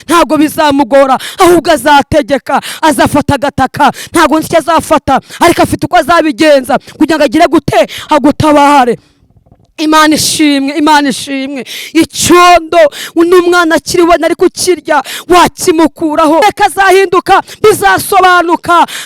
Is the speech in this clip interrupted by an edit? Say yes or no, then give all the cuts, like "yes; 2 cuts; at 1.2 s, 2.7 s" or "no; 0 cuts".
yes; 1 cut; at 16.4 s